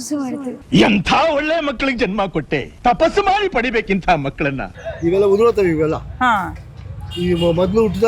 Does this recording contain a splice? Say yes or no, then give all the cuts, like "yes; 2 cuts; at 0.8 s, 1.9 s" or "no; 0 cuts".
yes; 1 cut; at 4.7 s